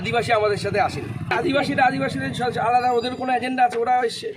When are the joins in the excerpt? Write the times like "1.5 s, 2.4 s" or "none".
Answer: 1.3 s